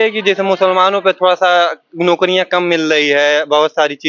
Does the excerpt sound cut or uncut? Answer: uncut